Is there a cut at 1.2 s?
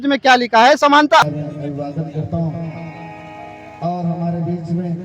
yes; 1 cut; at 1.2 s

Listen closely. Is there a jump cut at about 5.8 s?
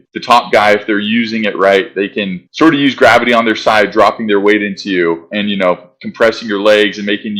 no; 0 cuts

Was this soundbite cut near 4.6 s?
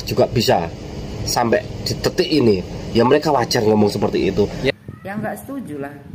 yes; 1 cut; at 4.6 s

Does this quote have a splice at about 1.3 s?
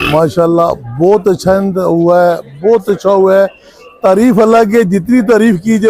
no; 0 cuts

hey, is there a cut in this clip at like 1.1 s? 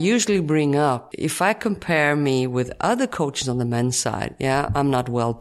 yes; 1 cut; at 1.1 s

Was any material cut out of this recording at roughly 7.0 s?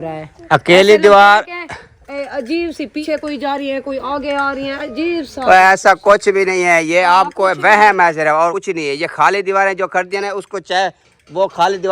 no; 2 cuts; at 3.0 s, 8.6 s

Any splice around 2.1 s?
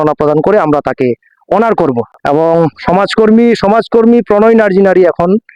yes; 1 cut; at 2.1 s

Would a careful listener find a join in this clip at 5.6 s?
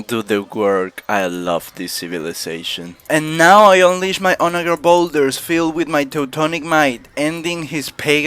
no; 1 cut; at 2.9 s

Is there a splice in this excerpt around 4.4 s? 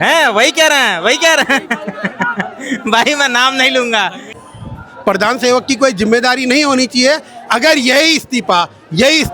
yes; 1 cut; at 4.4 s

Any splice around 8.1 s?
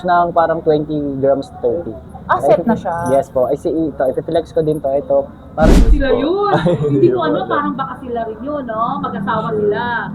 no; 1 cut; at 5.8 s

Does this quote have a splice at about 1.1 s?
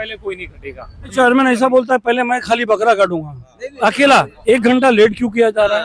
yes; 2 cuts; at 1.1 s, 4.3 s

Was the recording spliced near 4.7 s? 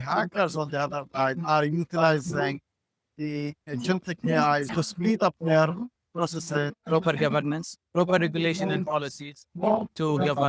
yes; 2 cuts; at 4.7 s, 6.8 s

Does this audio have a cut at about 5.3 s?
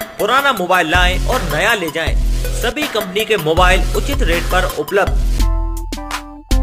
yes; 1 cut; at 5.3 s

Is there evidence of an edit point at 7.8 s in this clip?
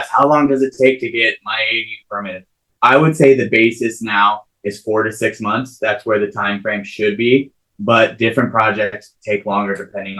no; 0 cuts

